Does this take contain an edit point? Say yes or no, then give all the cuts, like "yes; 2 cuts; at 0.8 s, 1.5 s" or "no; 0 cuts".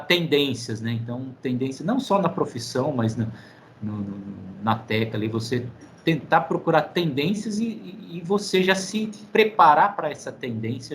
no; 0 cuts